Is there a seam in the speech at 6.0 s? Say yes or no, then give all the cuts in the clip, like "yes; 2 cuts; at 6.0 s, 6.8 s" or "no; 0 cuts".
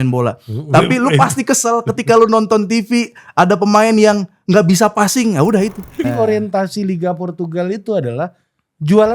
yes; 1 cut; at 6.0 s